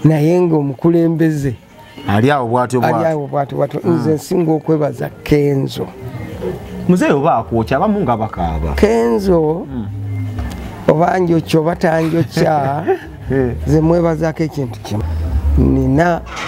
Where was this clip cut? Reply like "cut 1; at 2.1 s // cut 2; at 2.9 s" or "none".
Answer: cut 1; at 14.9 s